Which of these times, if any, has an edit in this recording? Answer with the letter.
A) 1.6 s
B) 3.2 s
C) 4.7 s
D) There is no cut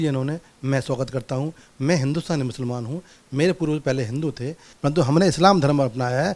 C